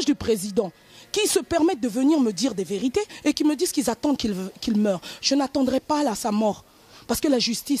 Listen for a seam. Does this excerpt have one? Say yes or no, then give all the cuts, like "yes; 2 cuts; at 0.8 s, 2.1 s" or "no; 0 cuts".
no; 0 cuts